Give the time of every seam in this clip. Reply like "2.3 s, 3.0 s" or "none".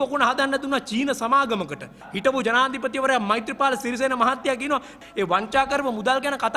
2.0 s, 5.0 s